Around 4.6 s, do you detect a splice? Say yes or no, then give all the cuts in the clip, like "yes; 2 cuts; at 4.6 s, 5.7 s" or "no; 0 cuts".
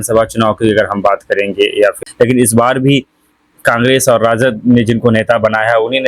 no; 1 cut; at 2.0 s